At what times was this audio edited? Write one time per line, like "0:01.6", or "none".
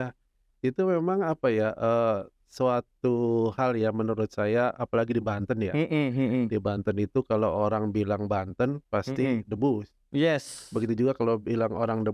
none